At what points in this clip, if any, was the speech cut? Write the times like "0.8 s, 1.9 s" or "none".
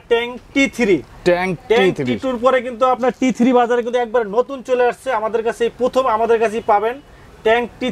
none